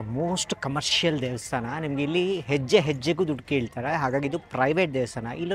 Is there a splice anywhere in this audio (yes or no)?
no